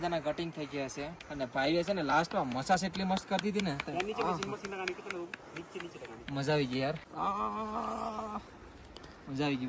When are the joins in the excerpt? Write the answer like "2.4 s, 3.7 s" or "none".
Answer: 1.2 s, 7.1 s